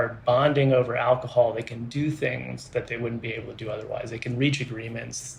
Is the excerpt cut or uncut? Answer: uncut